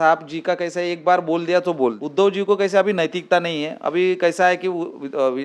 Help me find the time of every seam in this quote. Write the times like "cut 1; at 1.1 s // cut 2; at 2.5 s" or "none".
cut 1; at 2.0 s